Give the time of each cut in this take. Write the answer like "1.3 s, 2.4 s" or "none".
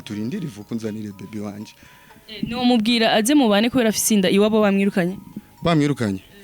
none